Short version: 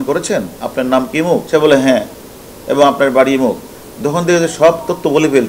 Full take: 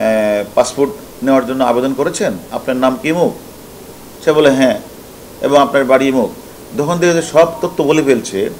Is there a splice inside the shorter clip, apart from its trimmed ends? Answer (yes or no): yes